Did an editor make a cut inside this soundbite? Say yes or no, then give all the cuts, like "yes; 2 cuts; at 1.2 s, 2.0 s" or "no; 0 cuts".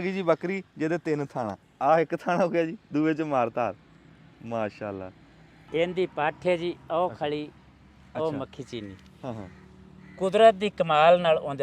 yes; 2 cuts; at 1.6 s, 5.5 s